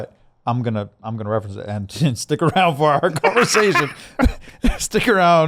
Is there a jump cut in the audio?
no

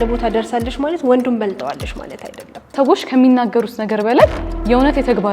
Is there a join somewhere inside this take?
yes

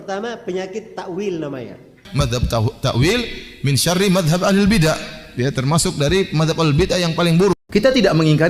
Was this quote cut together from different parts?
yes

